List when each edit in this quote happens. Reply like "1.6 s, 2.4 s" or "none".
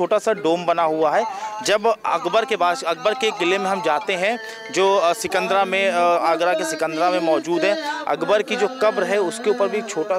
none